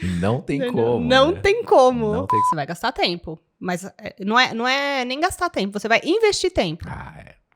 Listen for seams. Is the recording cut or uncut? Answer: cut